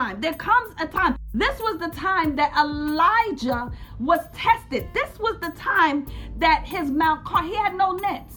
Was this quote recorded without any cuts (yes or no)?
no